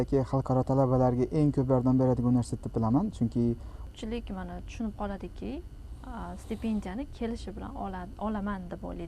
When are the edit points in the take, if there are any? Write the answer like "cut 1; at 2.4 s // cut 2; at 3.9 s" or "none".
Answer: cut 1; at 3.9 s